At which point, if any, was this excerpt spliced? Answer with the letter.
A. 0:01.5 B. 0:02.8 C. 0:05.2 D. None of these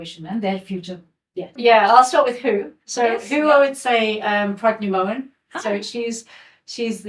A